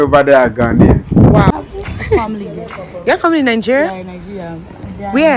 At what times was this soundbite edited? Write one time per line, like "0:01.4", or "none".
0:01.5